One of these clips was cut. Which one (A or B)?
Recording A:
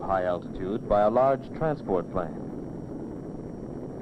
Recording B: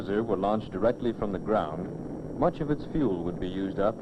A